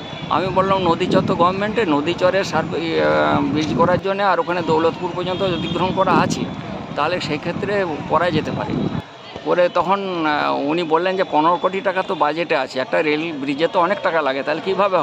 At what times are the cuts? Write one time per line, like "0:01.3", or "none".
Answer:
none